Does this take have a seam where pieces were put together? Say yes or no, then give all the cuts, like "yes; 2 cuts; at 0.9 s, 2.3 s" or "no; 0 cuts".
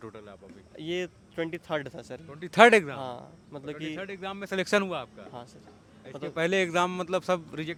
no; 0 cuts